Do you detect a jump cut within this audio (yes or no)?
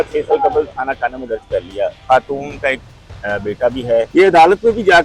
yes